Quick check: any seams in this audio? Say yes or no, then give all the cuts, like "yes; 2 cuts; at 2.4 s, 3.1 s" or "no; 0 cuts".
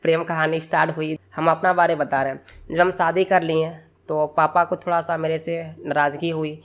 yes; 1 cut; at 1.2 s